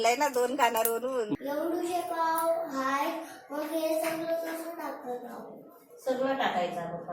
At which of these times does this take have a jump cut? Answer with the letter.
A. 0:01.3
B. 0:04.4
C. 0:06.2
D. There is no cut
A